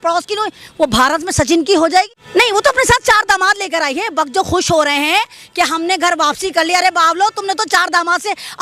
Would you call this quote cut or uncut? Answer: cut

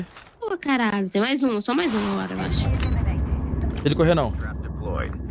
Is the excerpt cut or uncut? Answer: uncut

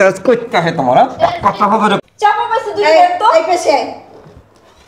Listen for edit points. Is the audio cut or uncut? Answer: cut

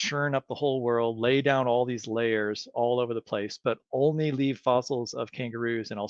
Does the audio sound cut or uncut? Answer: uncut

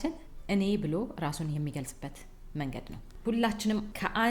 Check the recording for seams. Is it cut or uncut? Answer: cut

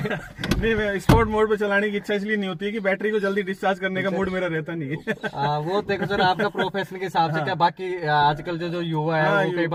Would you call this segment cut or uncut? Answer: uncut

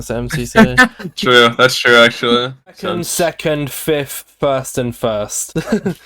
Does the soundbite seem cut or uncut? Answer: cut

